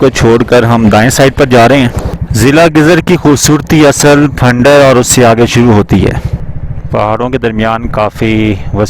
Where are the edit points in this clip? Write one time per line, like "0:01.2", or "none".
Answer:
0:02.0
0:06.3